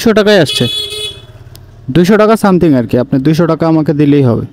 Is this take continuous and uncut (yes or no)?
yes